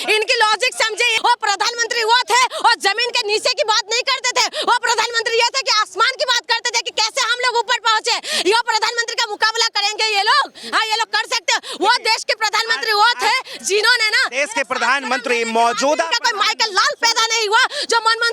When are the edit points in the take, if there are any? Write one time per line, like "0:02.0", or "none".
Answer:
0:01.1